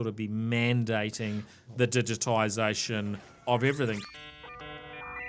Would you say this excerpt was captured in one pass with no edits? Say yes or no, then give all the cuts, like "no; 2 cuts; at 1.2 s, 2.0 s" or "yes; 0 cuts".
no; 2 cuts; at 3.3 s, 4.0 s